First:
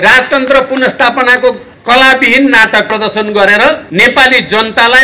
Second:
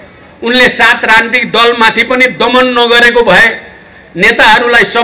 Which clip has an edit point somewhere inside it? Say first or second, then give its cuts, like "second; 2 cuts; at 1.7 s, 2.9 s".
first; 3 cuts; at 1.7 s, 2.9 s, 3.9 s